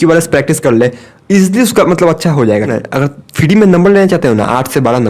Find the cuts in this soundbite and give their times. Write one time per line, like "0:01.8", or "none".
0:02.7